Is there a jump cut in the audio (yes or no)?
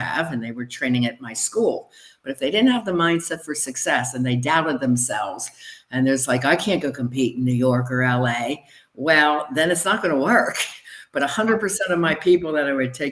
no